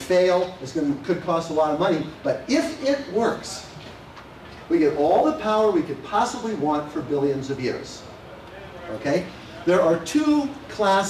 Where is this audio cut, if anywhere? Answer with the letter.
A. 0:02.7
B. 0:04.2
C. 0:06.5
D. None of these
A